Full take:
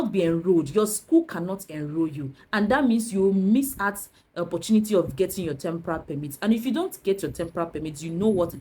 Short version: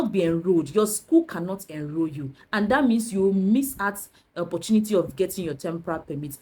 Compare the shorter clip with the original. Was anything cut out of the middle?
no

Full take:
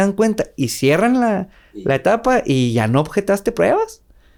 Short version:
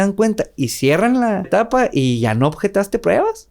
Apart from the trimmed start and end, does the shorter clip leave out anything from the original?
yes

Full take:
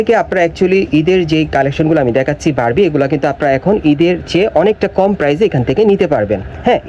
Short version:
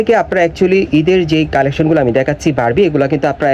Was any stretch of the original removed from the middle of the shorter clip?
no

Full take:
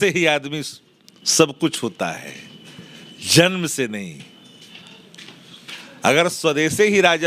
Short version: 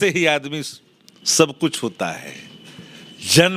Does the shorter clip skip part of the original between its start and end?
no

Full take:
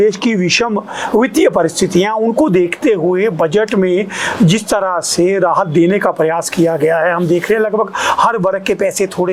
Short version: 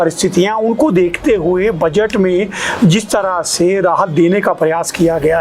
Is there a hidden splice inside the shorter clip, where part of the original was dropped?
no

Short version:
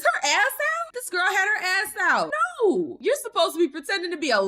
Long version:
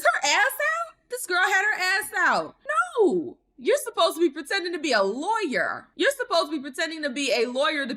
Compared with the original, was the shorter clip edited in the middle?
yes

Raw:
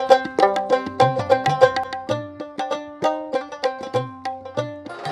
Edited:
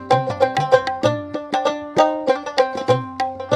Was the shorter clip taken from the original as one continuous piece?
no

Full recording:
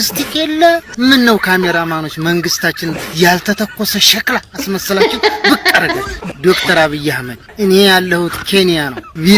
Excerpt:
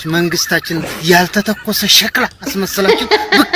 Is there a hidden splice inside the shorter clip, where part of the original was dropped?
no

